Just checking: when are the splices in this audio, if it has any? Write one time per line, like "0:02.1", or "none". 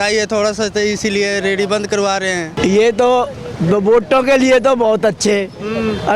0:02.5